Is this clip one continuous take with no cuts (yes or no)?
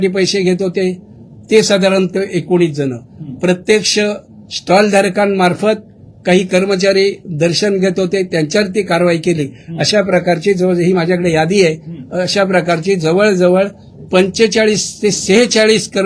yes